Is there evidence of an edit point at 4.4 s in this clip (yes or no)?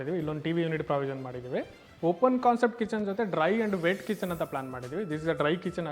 no